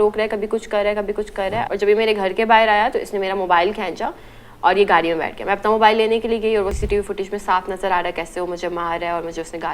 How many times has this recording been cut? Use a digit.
2